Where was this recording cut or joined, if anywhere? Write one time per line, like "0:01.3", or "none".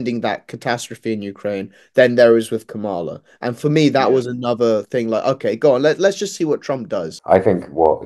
0:07.1